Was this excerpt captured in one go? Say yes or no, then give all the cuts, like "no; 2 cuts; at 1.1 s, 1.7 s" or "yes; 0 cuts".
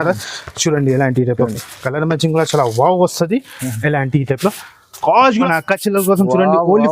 no; 1 cut; at 5.5 s